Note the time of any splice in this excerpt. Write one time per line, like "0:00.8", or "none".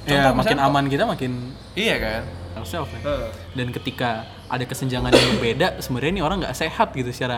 0:02.6